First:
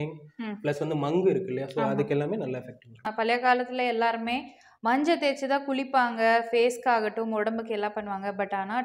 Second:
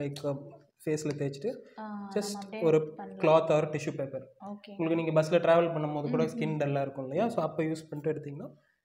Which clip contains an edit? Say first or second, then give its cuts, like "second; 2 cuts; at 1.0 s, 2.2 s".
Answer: first; 1 cut; at 3.0 s